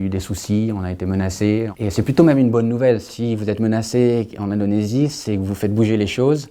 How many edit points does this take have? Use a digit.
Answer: 1